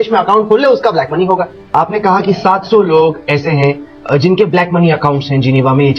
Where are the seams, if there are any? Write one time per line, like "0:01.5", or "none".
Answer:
0:01.6